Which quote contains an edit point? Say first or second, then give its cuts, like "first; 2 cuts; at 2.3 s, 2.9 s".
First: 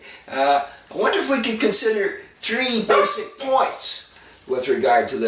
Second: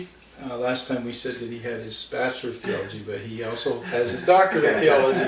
second; 1 cut; at 2.9 s